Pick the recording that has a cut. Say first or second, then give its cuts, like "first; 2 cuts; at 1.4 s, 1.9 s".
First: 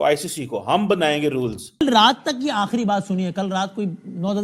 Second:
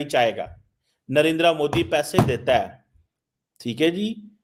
first; 1 cut; at 1.8 s